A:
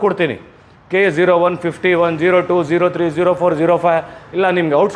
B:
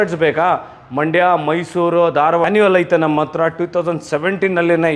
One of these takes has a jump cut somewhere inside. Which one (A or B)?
B